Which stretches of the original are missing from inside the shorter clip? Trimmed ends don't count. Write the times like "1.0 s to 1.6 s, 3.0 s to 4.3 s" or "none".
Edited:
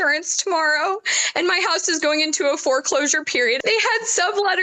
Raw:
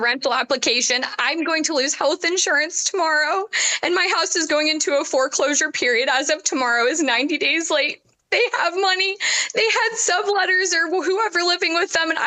6.0 s to 9.5 s